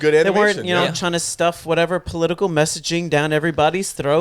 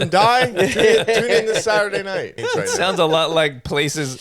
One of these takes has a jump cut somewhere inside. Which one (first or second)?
second